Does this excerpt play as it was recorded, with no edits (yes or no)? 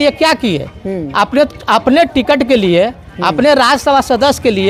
yes